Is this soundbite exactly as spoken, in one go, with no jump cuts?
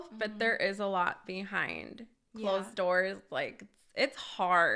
yes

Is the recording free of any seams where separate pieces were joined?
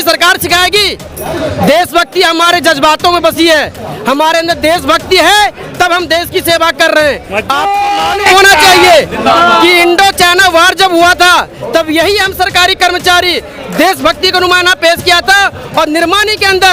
yes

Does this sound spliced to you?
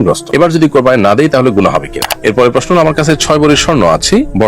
yes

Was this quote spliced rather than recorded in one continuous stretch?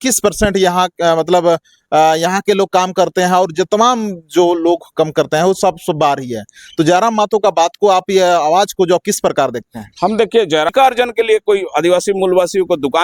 yes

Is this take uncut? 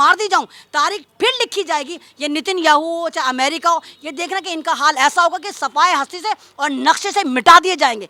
yes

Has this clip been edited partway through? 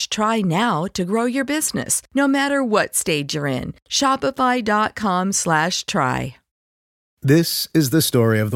yes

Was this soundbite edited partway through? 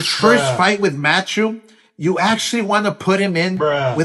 no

